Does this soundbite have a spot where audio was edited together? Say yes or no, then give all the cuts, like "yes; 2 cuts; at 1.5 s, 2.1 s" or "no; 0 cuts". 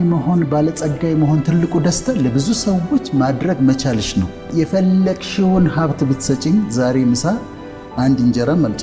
yes; 1 cut; at 4.4 s